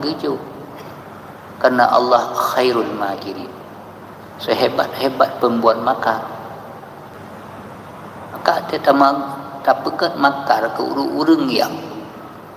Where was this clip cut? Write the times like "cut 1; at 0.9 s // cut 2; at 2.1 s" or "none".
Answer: cut 1; at 7.1 s